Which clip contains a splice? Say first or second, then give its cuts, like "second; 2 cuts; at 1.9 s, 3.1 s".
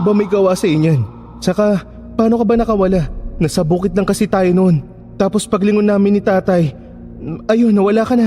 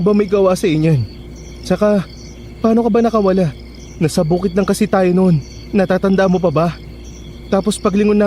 first; 3 cuts; at 1.6 s, 3.2 s, 4.9 s